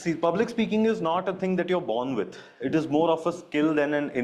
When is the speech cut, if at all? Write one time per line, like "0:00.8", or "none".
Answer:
none